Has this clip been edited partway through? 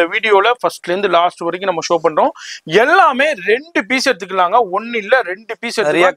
no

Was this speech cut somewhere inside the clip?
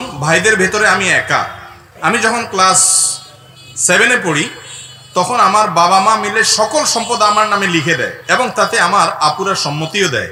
no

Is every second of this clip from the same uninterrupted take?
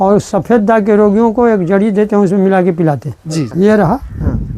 no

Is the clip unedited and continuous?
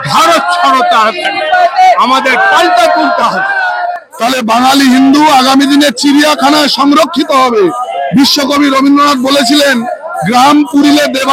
no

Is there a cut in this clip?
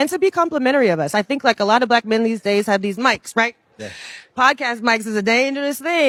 no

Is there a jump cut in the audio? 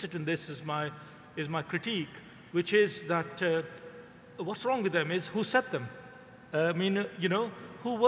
yes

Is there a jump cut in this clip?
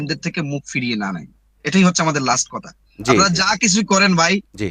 no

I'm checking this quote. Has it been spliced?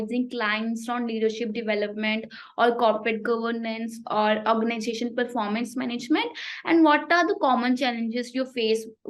no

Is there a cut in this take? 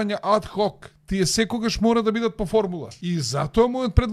yes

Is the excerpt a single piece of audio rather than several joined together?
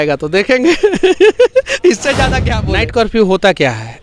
no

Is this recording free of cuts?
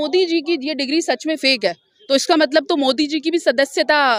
yes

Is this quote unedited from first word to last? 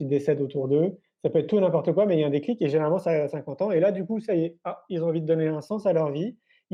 yes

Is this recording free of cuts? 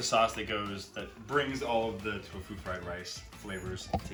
yes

